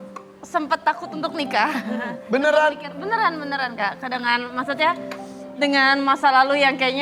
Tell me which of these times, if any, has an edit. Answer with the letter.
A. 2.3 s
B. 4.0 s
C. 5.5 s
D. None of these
D